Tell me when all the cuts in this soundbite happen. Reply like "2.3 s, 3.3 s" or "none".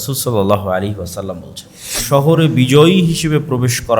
2.0 s